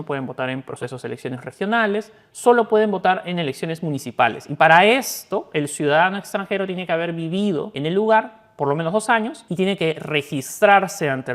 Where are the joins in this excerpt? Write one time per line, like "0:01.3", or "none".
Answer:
0:07.7
0:09.4